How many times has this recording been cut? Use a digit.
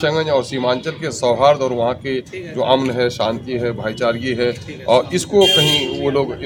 0